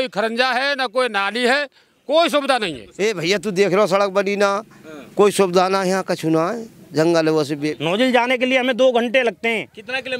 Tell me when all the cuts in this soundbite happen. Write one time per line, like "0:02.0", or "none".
0:02.8
0:07.7